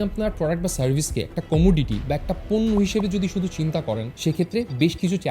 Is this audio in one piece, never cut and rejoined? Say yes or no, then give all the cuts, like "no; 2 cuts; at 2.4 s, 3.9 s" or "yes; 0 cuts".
no; 1 cut; at 4.1 s